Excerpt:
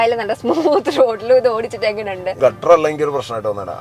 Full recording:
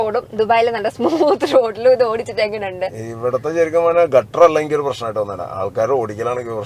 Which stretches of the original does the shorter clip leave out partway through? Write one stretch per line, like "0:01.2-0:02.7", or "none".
0:02.9-0:04.1